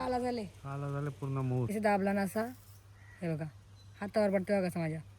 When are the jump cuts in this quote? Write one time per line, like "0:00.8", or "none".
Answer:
0:01.7